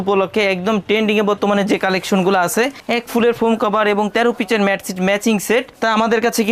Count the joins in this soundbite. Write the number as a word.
zero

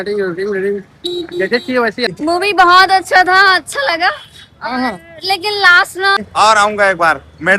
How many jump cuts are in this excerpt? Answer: two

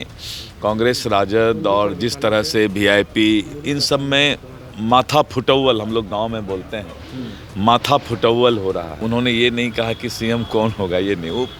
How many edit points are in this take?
one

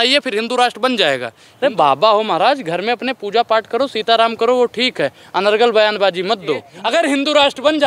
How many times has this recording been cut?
two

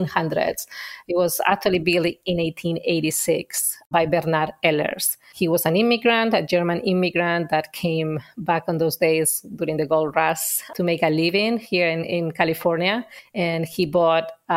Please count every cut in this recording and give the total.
zero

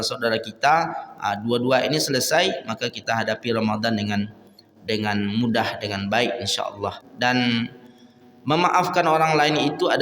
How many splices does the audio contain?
one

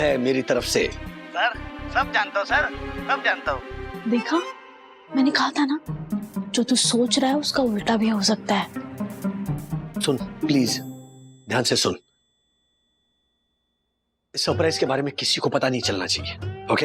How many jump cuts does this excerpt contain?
zero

